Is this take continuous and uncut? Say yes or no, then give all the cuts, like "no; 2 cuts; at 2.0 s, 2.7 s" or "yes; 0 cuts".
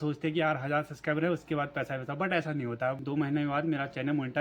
no; 1 cut; at 3.0 s